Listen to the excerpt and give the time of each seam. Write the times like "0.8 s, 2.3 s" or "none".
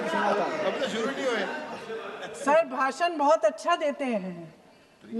none